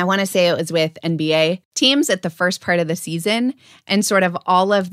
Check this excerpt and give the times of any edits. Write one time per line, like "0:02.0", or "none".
0:01.7

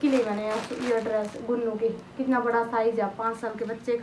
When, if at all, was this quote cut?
none

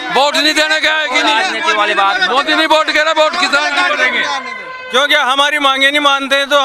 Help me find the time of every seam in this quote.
none

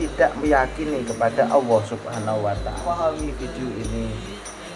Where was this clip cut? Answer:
0:02.8

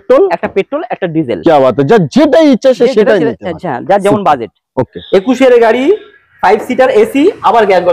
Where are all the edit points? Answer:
0:05.0

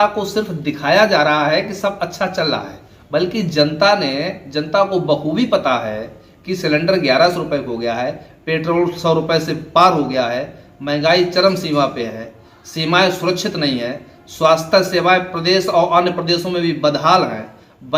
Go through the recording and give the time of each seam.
none

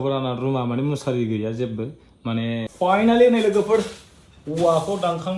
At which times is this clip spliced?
0:02.7

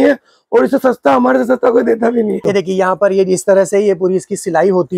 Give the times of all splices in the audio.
0:02.4

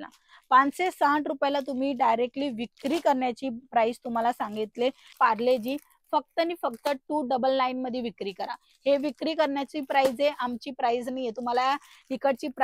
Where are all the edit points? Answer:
0:05.1

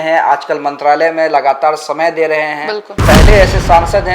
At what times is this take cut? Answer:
0:03.0

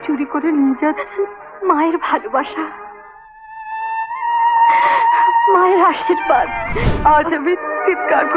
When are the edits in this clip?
0:06.7

